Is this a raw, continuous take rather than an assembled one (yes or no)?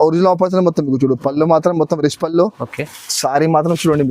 yes